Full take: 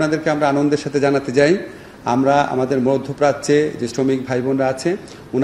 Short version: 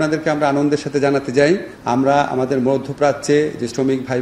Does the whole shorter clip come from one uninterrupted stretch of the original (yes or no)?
no